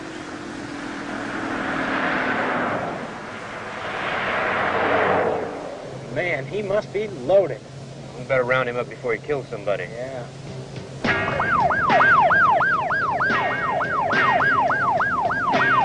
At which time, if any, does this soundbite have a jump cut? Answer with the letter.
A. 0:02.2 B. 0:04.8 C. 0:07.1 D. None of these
C